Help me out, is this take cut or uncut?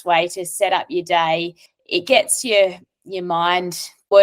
cut